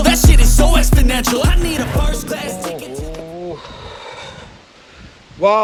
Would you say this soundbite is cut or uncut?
uncut